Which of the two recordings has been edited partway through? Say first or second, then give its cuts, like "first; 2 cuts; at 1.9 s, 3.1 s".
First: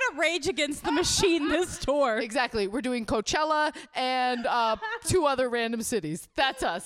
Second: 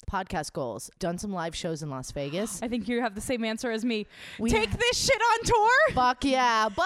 second; 1 cut; at 1.0 s